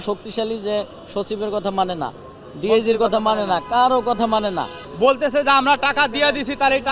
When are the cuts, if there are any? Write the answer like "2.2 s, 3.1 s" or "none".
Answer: 4.8 s